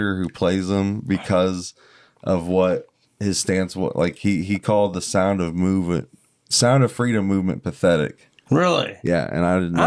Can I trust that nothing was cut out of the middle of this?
no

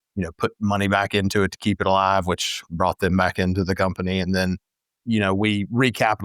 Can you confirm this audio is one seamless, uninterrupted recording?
yes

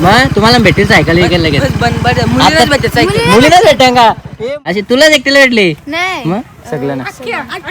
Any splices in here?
yes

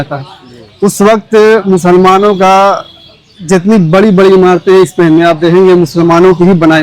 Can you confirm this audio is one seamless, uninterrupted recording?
yes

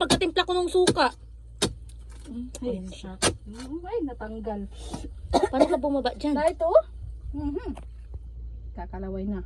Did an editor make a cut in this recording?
no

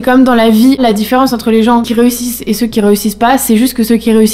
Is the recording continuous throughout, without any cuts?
no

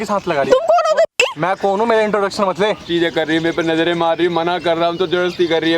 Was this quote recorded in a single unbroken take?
no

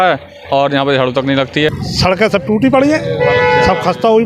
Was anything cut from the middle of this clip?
yes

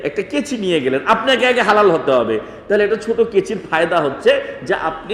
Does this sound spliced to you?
no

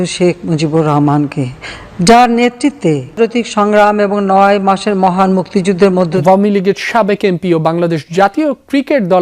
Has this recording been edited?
yes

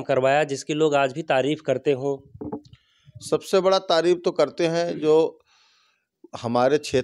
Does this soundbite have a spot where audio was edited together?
no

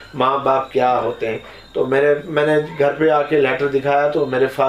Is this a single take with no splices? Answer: yes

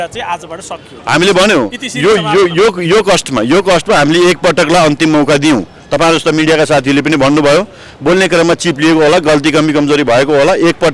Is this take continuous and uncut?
yes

